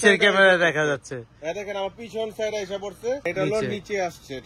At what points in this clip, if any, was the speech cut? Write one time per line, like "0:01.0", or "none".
0:03.3